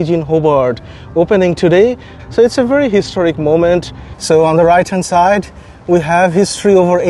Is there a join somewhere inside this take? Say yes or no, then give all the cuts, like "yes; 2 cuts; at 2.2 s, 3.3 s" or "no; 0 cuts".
yes; 1 cut; at 4.0 s